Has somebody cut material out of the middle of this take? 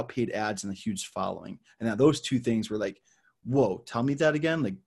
no; 0 cuts

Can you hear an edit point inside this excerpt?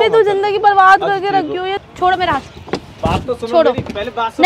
yes; 1 cut; at 1.8 s

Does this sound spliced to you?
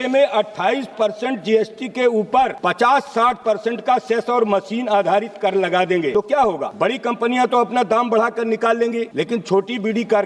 yes; 3 cuts; at 2.6 s, 6.4 s, 9.1 s

